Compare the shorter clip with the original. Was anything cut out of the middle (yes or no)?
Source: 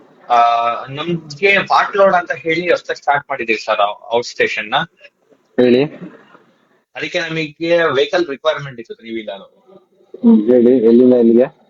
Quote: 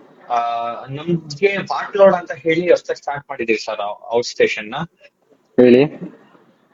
no